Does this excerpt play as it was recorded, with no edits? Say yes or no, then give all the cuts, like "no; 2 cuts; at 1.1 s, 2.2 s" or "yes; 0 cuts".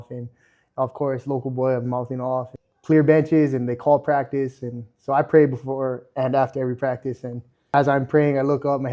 no; 2 cuts; at 2.6 s, 7.7 s